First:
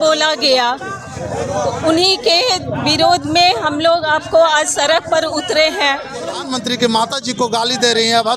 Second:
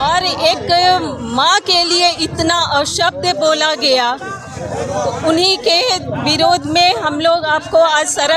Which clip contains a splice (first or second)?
first